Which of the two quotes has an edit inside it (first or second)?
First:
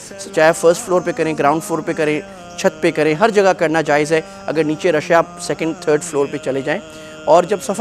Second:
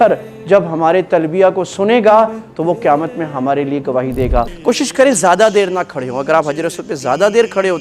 second